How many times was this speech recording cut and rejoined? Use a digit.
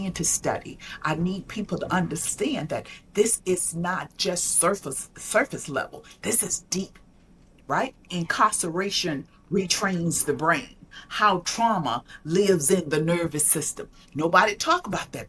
0